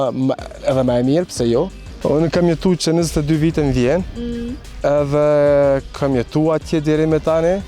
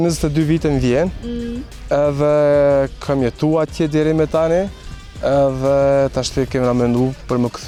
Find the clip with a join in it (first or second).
first